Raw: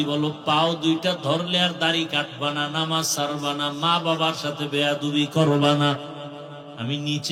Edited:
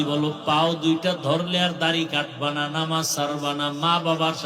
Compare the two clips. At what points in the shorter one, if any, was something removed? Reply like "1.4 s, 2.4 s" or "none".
none